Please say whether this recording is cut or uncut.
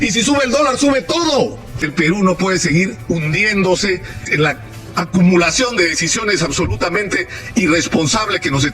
cut